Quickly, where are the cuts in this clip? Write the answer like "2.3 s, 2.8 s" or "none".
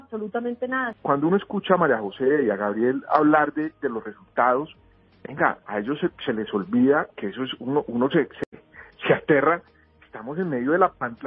1.0 s